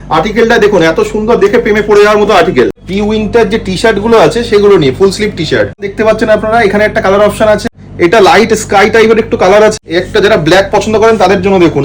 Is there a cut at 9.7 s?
yes; 4 cuts; at 2.9 s, 5.9 s, 7.7 s, 9.7 s

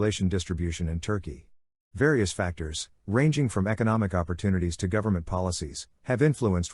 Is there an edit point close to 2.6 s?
yes; 1 cut; at 2.6 s

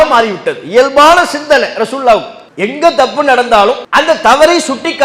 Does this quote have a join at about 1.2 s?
no; 1 cut; at 3.8 s

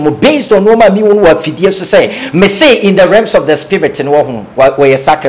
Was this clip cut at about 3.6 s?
no; 0 cuts

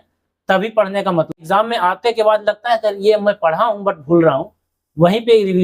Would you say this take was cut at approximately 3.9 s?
no; 1 cut; at 1.4 s

